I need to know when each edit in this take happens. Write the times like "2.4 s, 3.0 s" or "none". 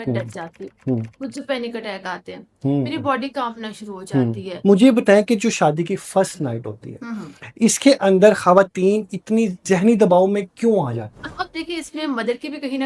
4.5 s, 9.6 s, 11.5 s